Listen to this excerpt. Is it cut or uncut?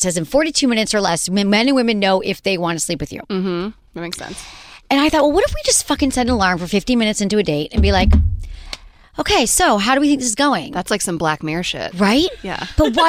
uncut